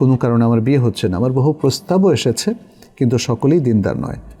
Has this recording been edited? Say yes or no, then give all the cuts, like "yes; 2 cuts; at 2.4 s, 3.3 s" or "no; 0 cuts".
no; 0 cuts